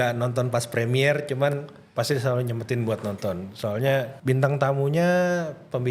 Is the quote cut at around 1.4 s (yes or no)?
no